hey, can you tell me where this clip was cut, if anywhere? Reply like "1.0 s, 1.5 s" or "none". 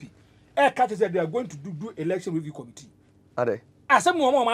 none